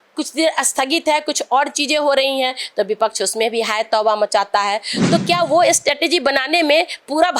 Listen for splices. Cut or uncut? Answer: cut